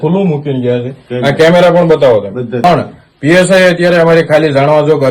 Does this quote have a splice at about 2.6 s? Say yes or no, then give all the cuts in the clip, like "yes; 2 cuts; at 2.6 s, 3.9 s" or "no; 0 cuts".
yes; 1 cut; at 2.6 s